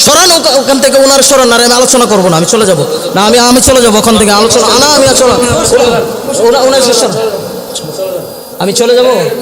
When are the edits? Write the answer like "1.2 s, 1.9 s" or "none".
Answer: none